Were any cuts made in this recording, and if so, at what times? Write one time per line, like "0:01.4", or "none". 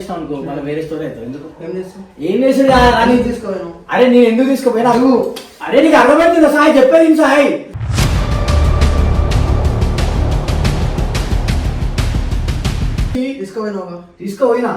0:13.1